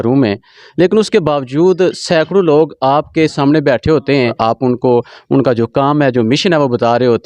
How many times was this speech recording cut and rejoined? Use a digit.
1